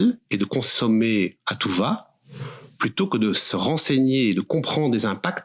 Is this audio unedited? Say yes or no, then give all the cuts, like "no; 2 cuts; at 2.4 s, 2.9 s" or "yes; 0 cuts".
yes; 0 cuts